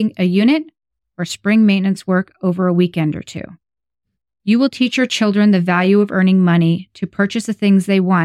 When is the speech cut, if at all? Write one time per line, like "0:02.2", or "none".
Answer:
none